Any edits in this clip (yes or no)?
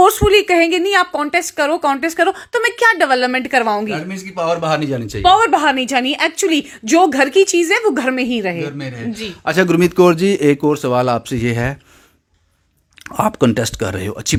no